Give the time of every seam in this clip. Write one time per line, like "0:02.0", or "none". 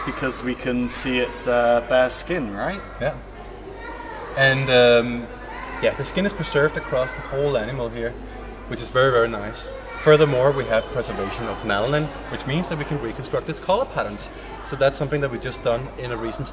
0:14.9